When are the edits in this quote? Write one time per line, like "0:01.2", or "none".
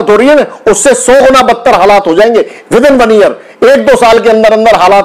none